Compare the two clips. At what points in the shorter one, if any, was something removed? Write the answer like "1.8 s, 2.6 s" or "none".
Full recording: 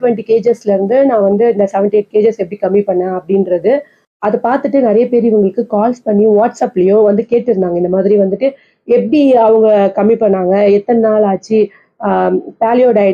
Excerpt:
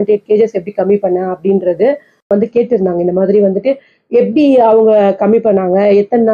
2.3 s